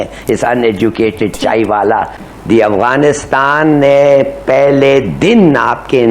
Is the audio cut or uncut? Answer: cut